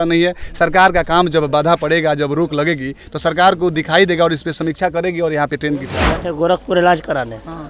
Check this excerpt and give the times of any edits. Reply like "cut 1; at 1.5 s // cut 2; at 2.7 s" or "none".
cut 1; at 6.2 s